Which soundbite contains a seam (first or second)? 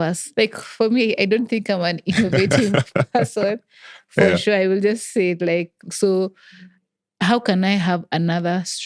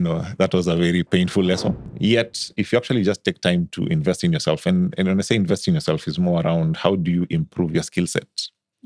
second